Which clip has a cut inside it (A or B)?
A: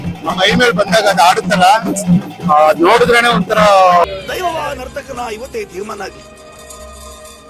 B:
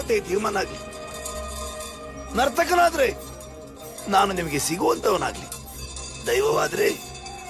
A